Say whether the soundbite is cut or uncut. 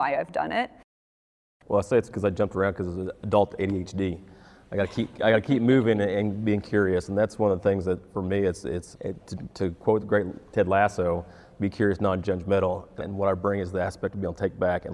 cut